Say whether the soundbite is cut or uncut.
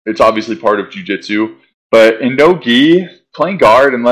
uncut